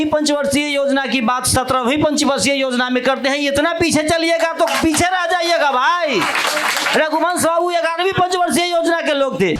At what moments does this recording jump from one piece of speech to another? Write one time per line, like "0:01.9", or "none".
none